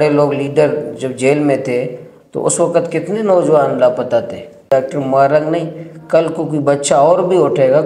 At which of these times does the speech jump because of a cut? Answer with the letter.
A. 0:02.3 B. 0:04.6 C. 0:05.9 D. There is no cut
B